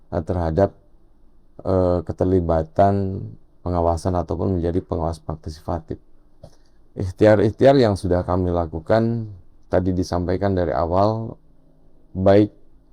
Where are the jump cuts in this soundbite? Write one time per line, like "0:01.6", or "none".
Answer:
none